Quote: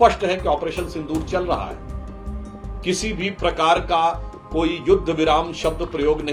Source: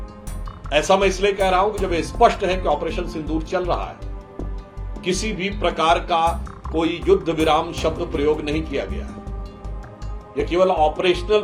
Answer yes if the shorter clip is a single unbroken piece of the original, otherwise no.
yes